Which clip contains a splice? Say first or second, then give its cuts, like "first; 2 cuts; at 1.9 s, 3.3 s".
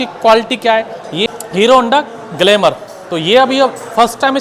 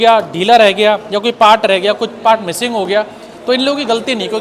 first; 1 cut; at 1.2 s